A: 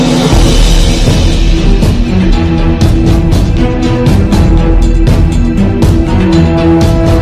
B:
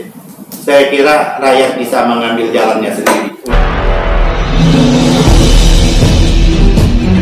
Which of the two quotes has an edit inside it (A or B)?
B